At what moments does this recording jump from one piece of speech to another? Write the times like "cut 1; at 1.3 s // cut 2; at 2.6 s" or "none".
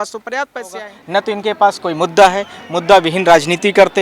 cut 1; at 0.9 s

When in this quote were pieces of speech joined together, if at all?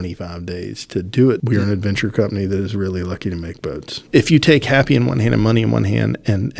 cut 1; at 1.4 s // cut 2; at 3.9 s

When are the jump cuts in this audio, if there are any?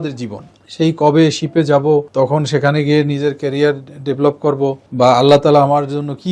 cut 1; at 2.1 s // cut 2; at 4.8 s

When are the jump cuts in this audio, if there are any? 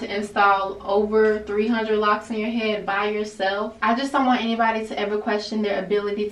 cut 1; at 3.8 s

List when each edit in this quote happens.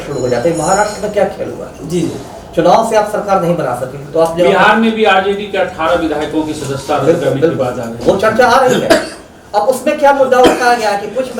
none

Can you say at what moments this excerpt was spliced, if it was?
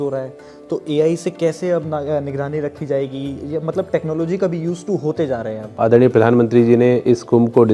cut 1; at 5.7 s

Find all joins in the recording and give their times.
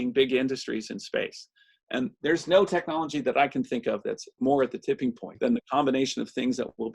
cut 1; at 5.3 s

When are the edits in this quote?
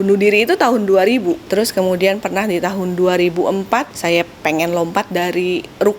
cut 1; at 1.5 s // cut 2; at 3.9 s

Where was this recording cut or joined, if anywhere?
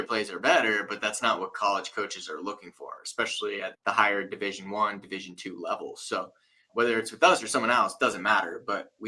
cut 1; at 3.8 s // cut 2; at 6.7 s

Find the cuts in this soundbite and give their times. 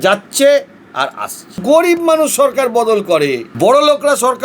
cut 1; at 1.5 s // cut 2; at 3.5 s

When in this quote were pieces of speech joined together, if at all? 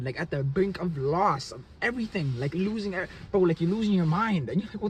none

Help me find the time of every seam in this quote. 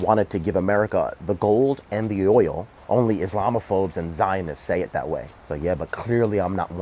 cut 1; at 2.7 s // cut 2; at 5.4 s

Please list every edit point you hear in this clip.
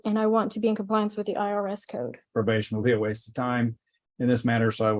cut 1; at 2.2 s

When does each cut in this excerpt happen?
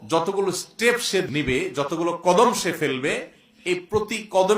cut 1; at 1.3 s

